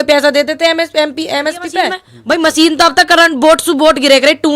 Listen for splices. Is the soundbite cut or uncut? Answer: cut